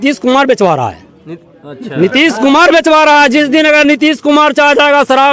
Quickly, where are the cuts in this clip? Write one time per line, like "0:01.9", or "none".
none